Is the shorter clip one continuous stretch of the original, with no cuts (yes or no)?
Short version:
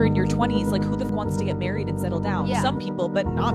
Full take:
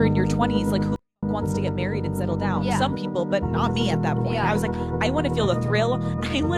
no